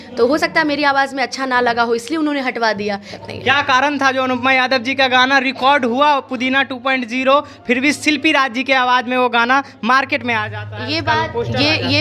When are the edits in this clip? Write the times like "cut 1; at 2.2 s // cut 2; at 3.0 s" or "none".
cut 1; at 3.1 s